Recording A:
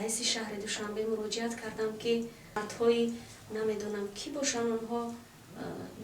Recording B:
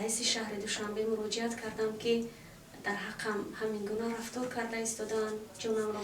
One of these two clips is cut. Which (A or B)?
A